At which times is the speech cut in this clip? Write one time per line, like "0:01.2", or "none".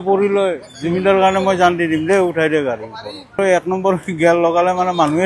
0:03.4